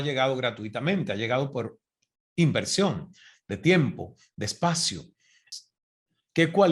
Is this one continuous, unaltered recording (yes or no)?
no